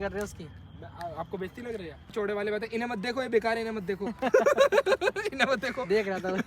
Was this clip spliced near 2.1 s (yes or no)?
yes